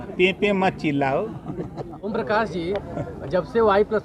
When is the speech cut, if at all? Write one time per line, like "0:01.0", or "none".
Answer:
0:02.0

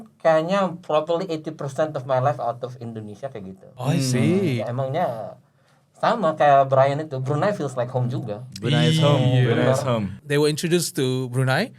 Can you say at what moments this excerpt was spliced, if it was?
0:03.6
0:04.6
0:10.2

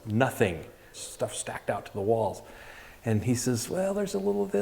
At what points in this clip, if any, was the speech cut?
0:01.0

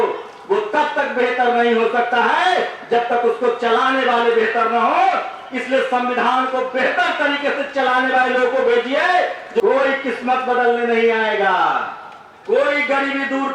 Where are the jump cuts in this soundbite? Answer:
0:09.6

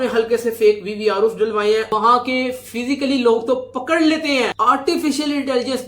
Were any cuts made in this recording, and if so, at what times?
0:01.9

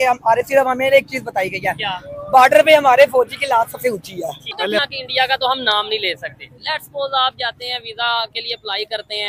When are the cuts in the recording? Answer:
0:04.7

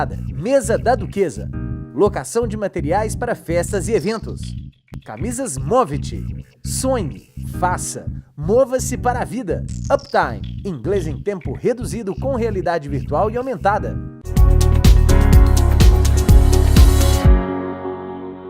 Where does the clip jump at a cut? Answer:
0:14.5

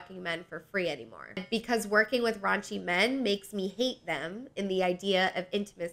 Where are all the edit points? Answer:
0:01.5

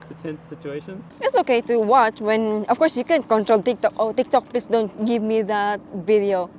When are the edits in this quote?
0:01.1

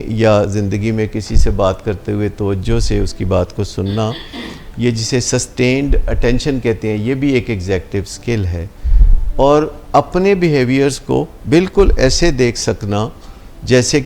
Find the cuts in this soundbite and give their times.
none

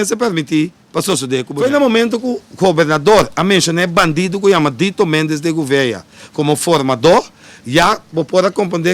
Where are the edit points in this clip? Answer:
0:01.5

